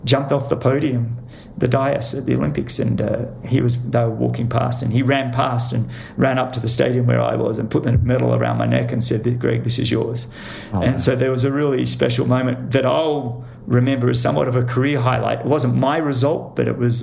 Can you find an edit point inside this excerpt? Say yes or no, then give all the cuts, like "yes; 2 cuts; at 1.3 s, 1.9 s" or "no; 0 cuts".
no; 0 cuts